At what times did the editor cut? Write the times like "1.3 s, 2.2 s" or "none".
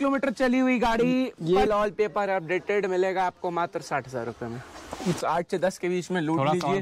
1.7 s, 5.2 s